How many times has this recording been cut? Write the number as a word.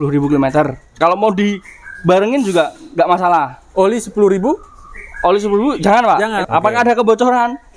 two